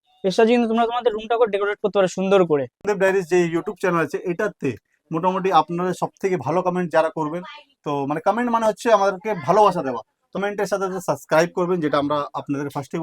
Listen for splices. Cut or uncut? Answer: cut